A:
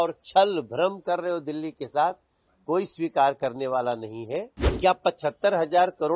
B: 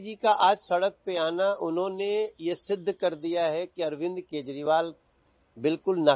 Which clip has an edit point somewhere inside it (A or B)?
A